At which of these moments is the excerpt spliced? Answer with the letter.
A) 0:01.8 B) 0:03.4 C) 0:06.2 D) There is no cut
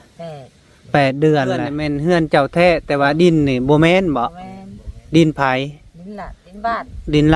A